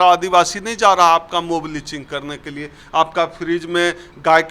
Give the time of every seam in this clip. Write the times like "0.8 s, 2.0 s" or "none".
none